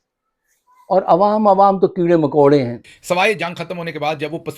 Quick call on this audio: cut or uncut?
cut